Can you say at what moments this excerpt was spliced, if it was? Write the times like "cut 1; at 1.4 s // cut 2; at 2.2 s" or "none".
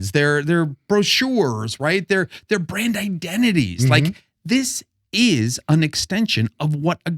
none

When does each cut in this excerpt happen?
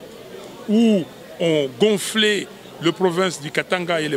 none

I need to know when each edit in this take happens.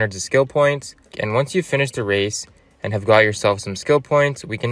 cut 1; at 1.2 s

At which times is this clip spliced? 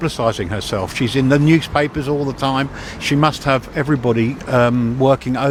none

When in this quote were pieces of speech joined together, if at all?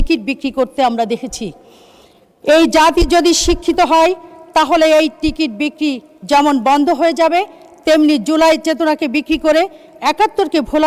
none

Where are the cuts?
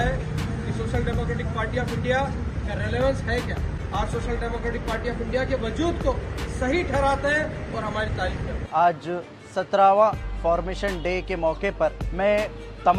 cut 1; at 3.8 s // cut 2; at 8.7 s

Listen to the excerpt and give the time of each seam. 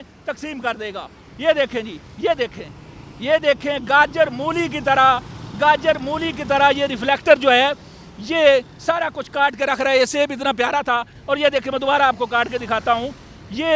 none

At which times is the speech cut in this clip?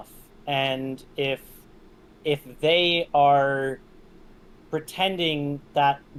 none

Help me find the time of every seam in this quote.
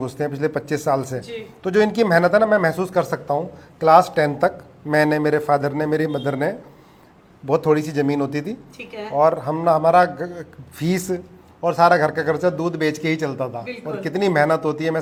none

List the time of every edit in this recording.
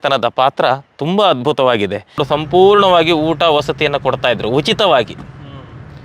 cut 1; at 2.2 s

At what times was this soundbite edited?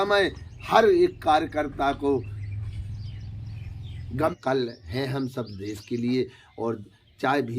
cut 1; at 4.4 s

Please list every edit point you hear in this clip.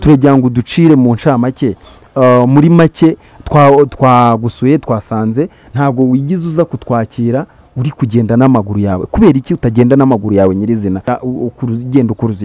cut 1; at 11.1 s

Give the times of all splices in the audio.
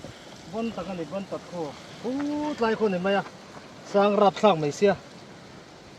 none

